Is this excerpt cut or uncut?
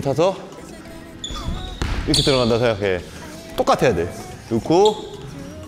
cut